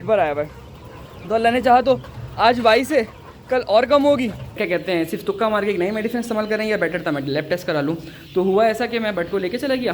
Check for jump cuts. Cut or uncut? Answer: cut